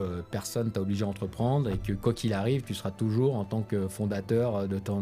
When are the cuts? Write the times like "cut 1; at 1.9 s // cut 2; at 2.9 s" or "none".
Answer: none

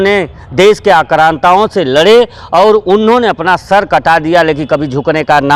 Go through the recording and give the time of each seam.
none

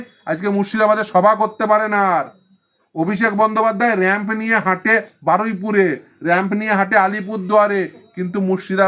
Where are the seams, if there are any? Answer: none

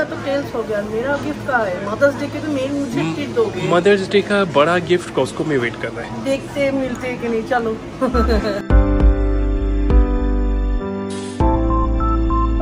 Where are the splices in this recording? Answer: none

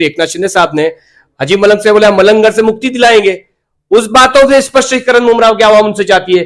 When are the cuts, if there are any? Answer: none

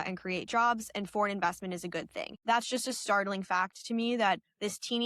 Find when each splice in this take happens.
cut 1; at 2.2 s

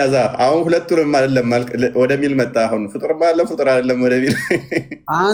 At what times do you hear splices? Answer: none

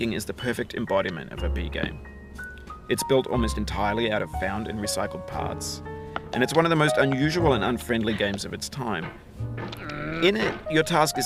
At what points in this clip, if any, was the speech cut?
none

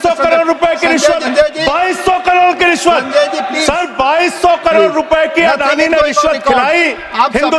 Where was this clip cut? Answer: cut 1; at 1.2 s // cut 2; at 3.5 s

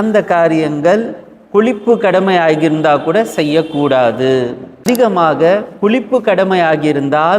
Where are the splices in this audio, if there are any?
cut 1; at 4.9 s

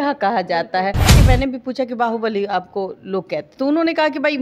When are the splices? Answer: cut 1; at 1.2 s

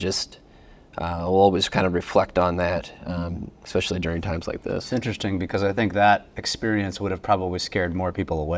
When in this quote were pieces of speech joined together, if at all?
none

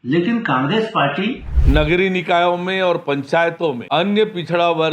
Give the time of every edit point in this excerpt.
cut 1; at 1.5 s // cut 2; at 3.8 s

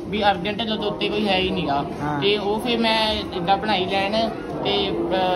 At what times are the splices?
none

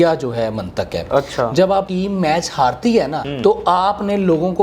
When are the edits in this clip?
cut 1; at 1.9 s // cut 2; at 3.2 s

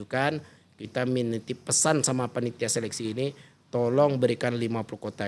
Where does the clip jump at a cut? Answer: none

